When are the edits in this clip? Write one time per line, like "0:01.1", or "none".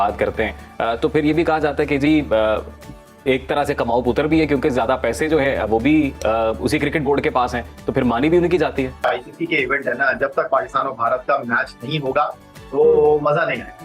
0:09.0